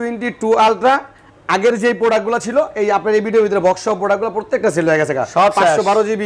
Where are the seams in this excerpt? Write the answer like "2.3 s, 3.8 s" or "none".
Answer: none